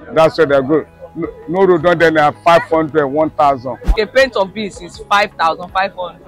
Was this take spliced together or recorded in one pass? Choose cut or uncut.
cut